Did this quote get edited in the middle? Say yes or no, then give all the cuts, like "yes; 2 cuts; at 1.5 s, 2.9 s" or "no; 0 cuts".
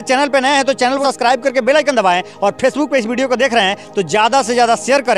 yes; 1 cut; at 1.0 s